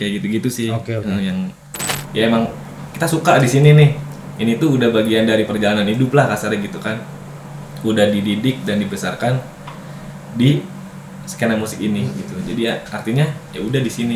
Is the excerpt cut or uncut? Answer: cut